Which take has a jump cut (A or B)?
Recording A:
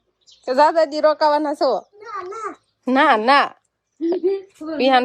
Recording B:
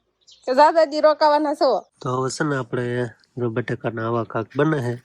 B